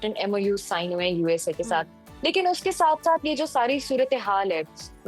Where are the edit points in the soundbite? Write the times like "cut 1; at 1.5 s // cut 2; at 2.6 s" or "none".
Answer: none